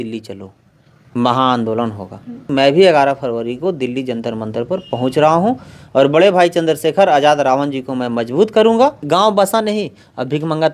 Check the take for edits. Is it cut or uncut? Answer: cut